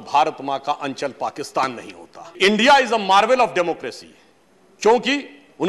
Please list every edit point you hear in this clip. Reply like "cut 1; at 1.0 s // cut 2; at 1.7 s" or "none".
cut 1; at 2.4 s